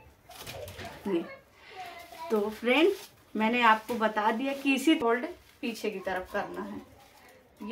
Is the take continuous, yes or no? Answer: no